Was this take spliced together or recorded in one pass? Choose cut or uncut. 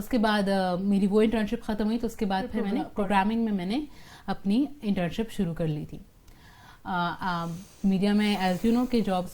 cut